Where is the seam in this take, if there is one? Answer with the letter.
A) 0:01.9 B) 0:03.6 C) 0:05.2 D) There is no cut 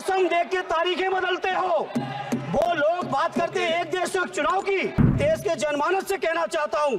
C